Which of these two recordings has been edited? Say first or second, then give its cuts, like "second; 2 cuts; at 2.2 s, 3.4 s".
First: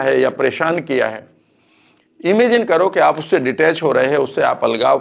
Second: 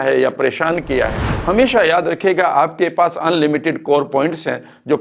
second; 1 cut; at 1.3 s